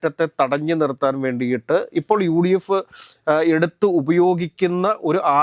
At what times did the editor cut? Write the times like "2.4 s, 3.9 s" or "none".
none